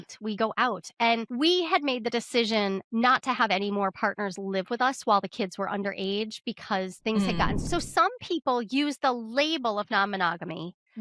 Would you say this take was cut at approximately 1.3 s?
yes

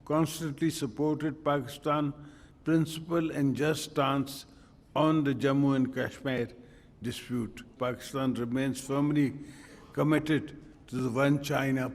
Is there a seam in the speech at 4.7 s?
no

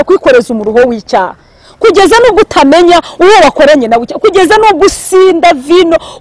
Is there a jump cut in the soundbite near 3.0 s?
no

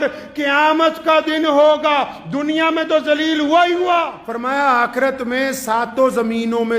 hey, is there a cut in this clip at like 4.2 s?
yes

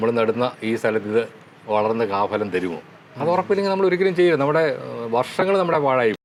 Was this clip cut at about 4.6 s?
no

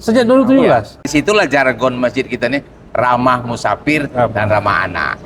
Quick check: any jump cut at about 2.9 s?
no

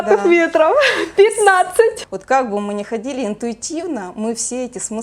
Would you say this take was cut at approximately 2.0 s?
yes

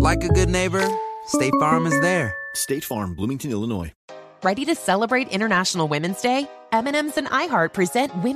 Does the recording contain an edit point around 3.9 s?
yes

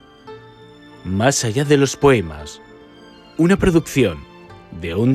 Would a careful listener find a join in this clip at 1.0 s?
yes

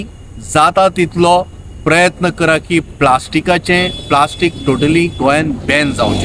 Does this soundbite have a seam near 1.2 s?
no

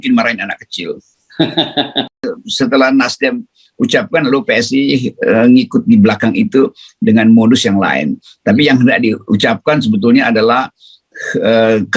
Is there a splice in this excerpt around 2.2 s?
yes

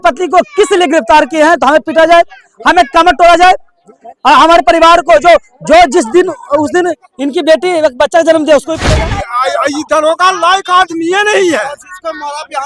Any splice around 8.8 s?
yes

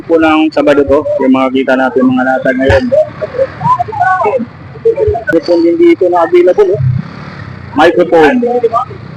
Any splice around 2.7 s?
no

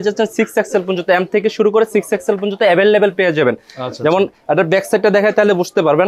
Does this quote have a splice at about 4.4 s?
no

